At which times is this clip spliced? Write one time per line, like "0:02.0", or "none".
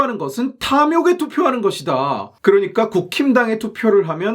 0:02.3